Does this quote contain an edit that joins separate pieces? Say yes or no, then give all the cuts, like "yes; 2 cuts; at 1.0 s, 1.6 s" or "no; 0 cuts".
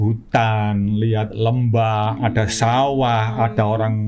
no; 0 cuts